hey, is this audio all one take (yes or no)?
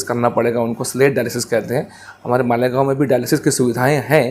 yes